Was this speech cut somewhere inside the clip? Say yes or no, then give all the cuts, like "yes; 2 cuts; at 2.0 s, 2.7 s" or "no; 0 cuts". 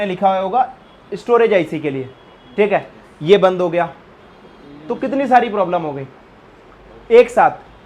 no; 0 cuts